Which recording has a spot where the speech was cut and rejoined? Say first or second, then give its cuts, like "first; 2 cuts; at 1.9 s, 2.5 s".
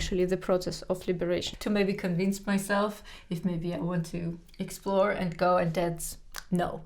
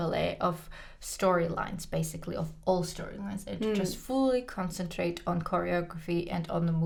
first; 1 cut; at 1.5 s